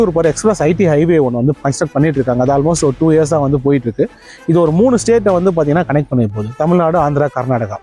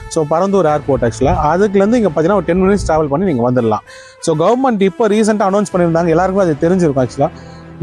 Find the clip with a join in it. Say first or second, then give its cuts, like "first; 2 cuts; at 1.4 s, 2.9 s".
second; 1 cut; at 3.9 s